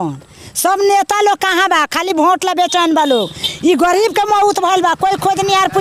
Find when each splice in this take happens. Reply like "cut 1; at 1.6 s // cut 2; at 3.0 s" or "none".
none